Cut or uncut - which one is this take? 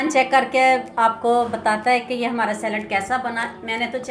uncut